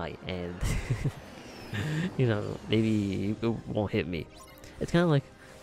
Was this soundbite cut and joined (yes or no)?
no